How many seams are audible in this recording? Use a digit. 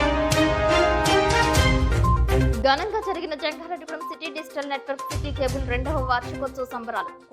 1